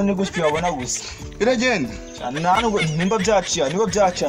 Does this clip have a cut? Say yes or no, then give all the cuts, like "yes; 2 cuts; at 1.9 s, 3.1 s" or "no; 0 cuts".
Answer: no; 0 cuts